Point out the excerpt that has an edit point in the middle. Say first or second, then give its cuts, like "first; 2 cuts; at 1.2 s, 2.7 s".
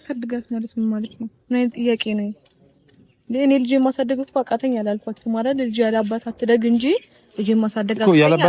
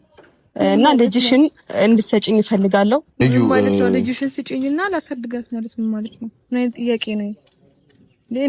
second; 1 cut; at 3.2 s